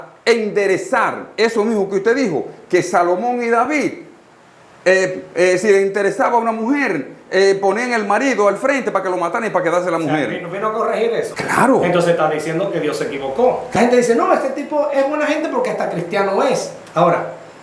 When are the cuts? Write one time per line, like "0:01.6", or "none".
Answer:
0:11.3
0:13.7